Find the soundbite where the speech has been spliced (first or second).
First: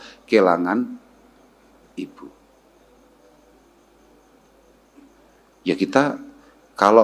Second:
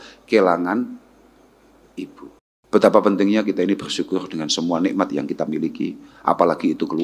second